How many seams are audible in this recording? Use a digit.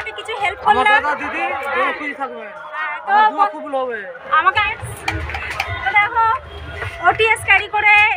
1